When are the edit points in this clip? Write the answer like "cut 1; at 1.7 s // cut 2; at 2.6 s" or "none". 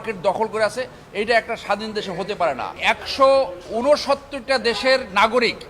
cut 1; at 2.7 s